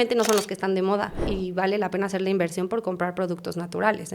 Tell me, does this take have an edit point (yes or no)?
yes